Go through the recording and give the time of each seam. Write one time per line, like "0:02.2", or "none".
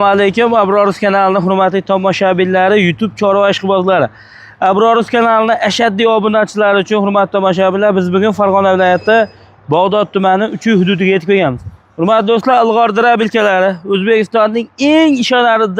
none